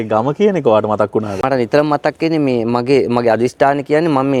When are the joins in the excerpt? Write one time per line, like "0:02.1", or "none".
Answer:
none